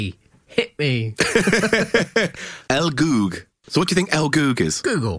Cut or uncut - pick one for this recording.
cut